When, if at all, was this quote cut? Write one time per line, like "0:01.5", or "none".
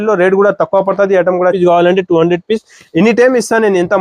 0:01.6